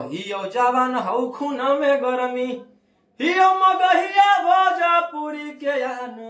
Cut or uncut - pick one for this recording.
uncut